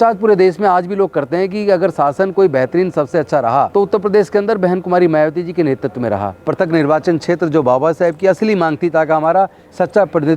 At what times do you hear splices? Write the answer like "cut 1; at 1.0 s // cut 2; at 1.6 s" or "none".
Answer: cut 1; at 3.7 s // cut 2; at 6.3 s